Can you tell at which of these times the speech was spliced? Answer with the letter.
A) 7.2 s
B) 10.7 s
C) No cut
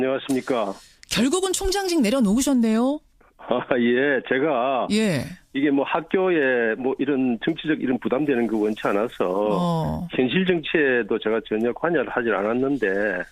B